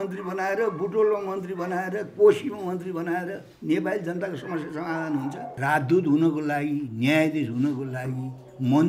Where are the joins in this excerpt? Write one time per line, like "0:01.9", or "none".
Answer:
0:05.5